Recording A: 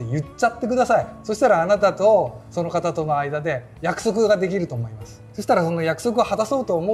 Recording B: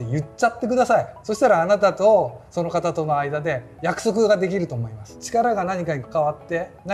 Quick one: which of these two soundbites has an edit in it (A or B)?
B